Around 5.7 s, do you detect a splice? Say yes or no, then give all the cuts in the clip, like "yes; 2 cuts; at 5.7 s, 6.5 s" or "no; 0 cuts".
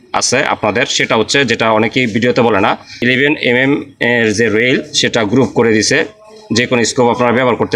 no; 1 cut; at 2.9 s